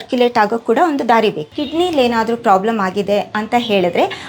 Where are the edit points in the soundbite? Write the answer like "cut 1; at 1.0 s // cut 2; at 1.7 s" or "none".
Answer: cut 1; at 1.5 s